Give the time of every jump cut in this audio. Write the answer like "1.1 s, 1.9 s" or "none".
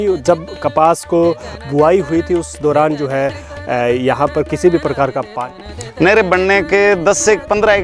5.5 s